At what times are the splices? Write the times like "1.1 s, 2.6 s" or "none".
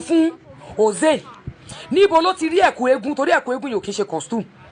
none